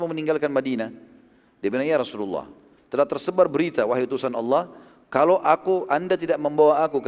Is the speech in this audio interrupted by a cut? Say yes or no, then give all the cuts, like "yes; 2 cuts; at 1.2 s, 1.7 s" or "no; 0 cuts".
no; 0 cuts